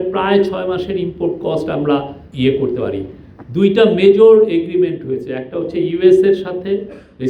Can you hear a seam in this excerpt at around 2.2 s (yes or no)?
yes